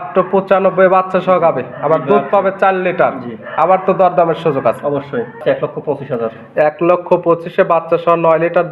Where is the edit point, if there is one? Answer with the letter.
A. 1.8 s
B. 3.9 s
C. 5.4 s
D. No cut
C